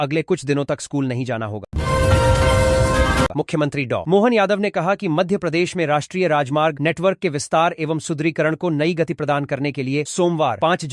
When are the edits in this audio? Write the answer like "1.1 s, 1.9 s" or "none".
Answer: 1.6 s, 3.3 s